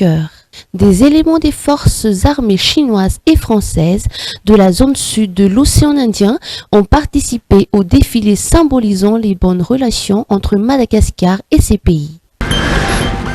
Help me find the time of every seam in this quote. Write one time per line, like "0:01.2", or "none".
0:12.4